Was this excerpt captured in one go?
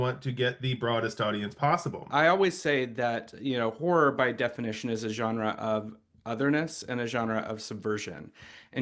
no; 1 cut; at 2.0 s

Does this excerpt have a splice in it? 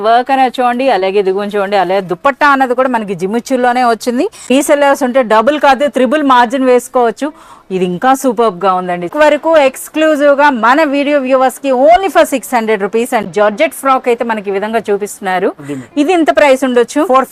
yes; 3 cuts; at 4.5 s, 9.1 s, 13.3 s

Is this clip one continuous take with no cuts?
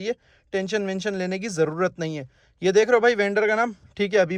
yes; 0 cuts

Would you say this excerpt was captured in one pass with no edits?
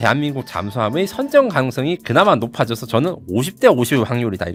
yes; 0 cuts

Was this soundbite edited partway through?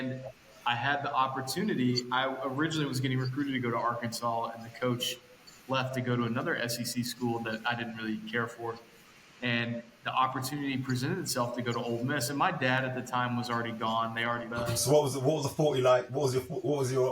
yes; 1 cut; at 14.5 s

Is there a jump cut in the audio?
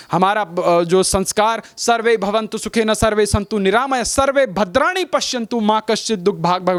no; 0 cuts

